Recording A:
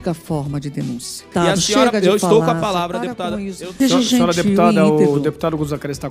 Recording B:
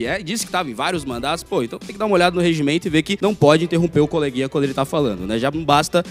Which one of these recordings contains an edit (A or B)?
A